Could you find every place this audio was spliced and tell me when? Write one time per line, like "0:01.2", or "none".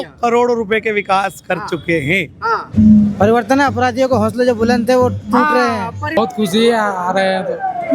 0:02.6
0:06.2